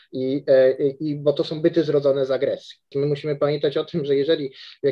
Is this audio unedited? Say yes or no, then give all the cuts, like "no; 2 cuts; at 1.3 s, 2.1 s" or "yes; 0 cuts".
no; 1 cut; at 2.9 s